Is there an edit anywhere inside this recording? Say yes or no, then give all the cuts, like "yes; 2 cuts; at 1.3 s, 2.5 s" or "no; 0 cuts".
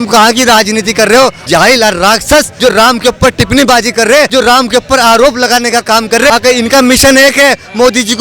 yes; 4 cuts; at 1.4 s, 2.5 s, 4.3 s, 6.3 s